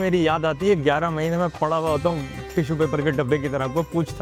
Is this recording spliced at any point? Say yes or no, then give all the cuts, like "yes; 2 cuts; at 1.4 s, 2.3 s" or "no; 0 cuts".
no; 0 cuts